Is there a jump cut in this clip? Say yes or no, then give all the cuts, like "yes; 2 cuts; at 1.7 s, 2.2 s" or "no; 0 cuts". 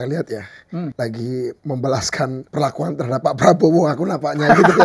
yes; 3 cuts; at 0.9 s, 1.6 s, 2.4 s